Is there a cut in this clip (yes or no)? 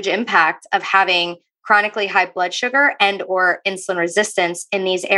no